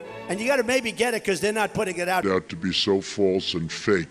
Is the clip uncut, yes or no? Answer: no